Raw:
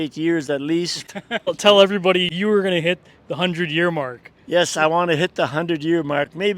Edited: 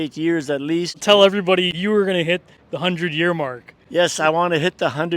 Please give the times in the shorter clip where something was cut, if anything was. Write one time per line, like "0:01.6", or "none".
0:01.0